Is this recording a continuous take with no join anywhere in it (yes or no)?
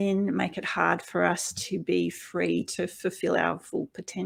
yes